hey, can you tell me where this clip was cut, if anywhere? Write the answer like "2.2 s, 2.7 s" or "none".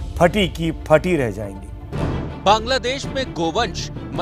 2.0 s